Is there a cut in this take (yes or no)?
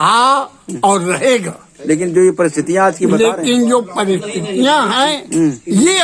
no